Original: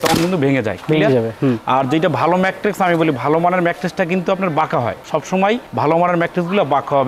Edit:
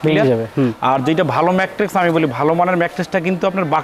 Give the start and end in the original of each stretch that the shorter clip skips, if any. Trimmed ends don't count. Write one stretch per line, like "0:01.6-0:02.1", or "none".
none